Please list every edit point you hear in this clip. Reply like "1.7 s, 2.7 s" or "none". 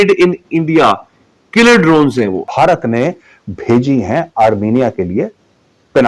2.4 s